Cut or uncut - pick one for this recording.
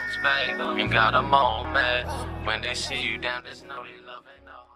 uncut